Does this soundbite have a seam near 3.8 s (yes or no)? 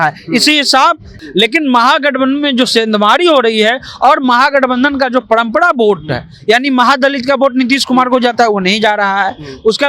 no